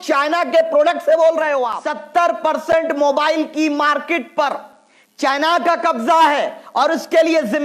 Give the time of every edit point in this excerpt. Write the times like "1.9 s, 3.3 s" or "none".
1.8 s

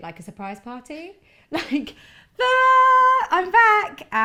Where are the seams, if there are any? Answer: none

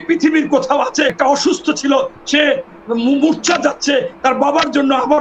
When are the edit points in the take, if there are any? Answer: 1.1 s

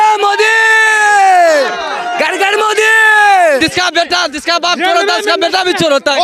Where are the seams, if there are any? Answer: 3.6 s

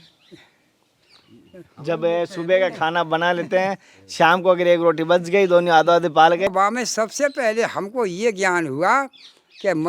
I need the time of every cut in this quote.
6.5 s

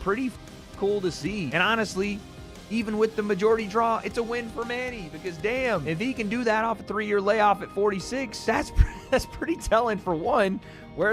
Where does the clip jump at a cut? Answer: none

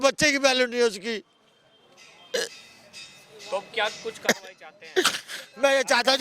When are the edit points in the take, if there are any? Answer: none

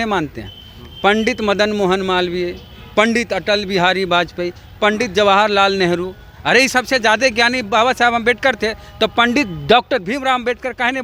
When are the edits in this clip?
none

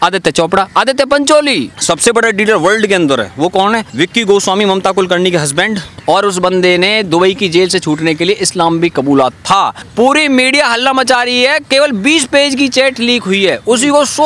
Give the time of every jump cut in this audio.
1.7 s, 5.9 s, 9.8 s

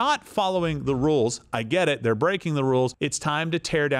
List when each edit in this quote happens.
2.9 s

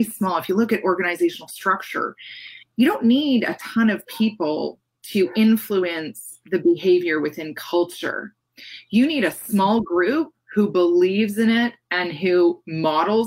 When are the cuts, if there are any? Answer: none

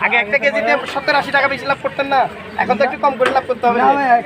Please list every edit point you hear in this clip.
none

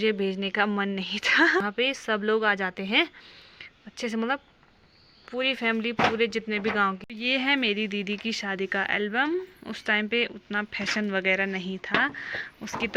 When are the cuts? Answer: 1.6 s, 7.0 s

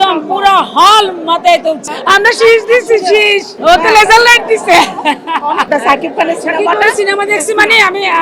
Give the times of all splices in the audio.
1.8 s, 5.7 s

